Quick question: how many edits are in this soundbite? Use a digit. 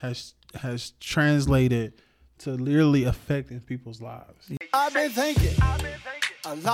1